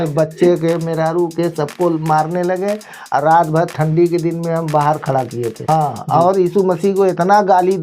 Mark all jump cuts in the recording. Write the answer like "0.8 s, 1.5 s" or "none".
5.7 s